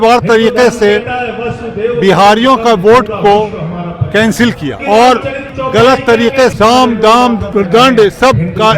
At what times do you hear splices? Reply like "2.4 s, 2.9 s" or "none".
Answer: 4.8 s, 5.5 s, 6.5 s, 7.4 s